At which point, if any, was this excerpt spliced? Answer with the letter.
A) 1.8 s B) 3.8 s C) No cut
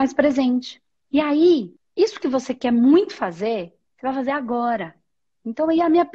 A